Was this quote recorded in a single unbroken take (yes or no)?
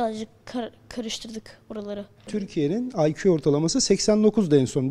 no